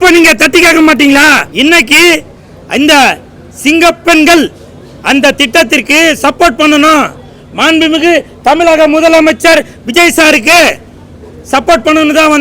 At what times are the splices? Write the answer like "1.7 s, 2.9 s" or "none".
1.5 s